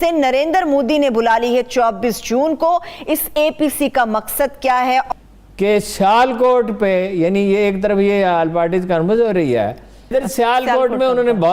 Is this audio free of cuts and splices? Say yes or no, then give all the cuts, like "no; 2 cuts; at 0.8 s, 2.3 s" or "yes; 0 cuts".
no; 2 cuts; at 5.1 s, 10.1 s